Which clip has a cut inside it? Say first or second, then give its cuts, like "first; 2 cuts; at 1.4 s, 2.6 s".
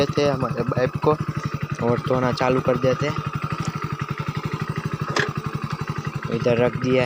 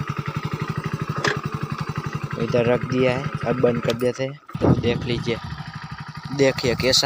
second; 2 cuts; at 4.6 s, 5.9 s